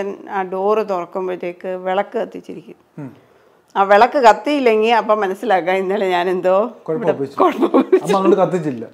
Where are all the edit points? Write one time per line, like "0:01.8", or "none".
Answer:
none